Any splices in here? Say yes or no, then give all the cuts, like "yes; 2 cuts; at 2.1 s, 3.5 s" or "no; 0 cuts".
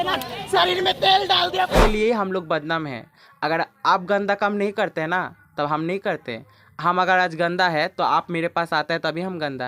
yes; 1 cut; at 1.8 s